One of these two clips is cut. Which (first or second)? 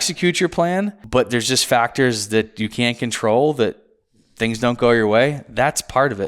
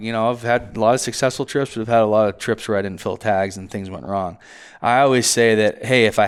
first